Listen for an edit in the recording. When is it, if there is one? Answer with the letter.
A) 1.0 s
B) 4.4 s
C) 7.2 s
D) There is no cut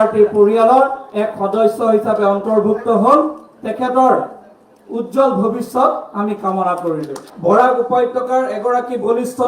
C